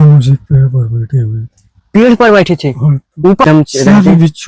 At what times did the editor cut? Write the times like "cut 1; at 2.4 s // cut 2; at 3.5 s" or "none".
cut 1; at 3.4 s